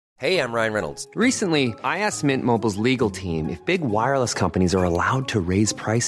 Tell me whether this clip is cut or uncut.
uncut